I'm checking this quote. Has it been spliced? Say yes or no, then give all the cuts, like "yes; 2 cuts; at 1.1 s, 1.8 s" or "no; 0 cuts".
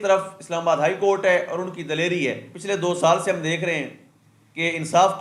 yes; 1 cut; at 2.5 s